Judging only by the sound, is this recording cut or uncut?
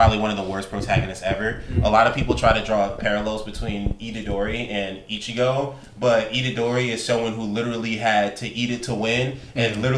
uncut